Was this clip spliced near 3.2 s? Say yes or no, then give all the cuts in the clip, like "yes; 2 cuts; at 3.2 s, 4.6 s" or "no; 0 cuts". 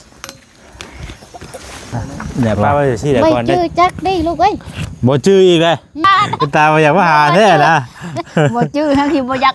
yes; 2 cuts; at 3.2 s, 6.1 s